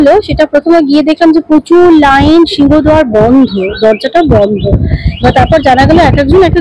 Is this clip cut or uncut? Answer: uncut